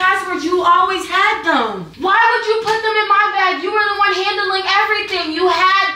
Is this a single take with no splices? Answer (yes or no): no